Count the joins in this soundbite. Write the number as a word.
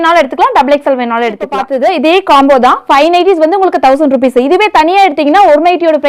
one